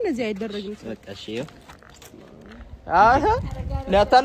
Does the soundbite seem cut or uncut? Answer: uncut